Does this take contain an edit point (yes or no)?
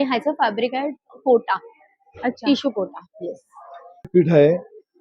yes